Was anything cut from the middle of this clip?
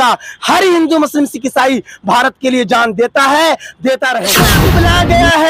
yes; 1 cut; at 4.6 s

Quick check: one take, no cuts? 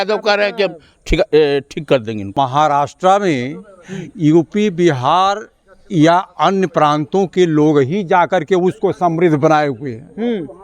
no; 1 cut; at 2.3 s

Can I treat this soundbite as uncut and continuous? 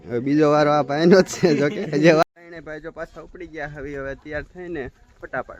no; 1 cut; at 2.2 s

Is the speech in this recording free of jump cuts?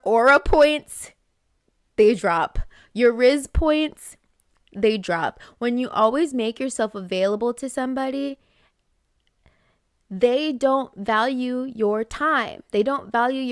yes; 0 cuts

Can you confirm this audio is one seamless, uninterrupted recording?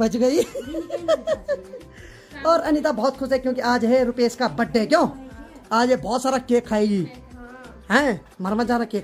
yes; 0 cuts

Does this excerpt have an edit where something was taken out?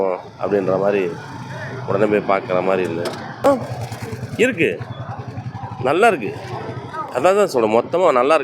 yes; 2 cuts; at 3.4 s, 7.0 s

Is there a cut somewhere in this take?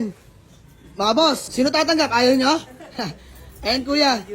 yes; 1 cut; at 1.5 s

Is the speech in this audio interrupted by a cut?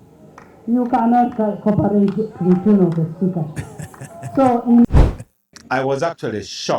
yes; 1 cut; at 4.9 s

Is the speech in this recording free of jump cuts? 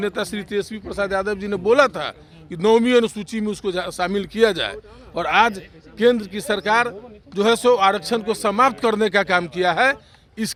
yes; 0 cuts

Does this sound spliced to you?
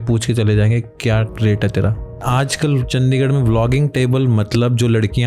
yes; 2 cuts; at 1.3 s, 2.2 s

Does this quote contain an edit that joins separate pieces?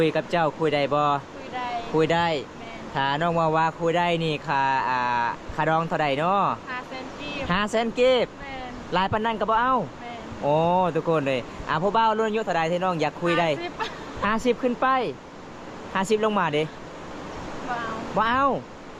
no; 0 cuts

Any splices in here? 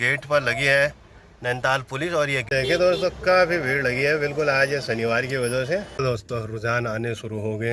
yes; 2 cuts; at 2.4 s, 5.9 s

